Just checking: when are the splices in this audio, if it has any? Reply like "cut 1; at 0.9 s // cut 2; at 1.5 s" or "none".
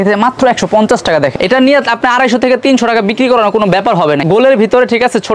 cut 1; at 1.4 s // cut 2; at 4.2 s